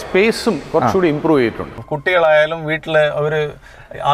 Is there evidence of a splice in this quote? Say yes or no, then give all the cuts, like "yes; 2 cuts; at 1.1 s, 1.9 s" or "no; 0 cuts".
yes; 1 cut; at 1.9 s